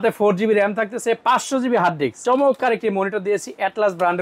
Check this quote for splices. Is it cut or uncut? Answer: cut